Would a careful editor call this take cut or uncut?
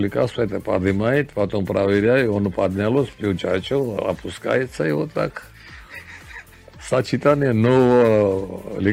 uncut